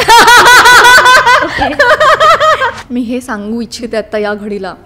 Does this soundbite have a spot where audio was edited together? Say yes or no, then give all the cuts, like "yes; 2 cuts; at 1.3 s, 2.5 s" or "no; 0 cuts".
yes; 1 cut; at 2.7 s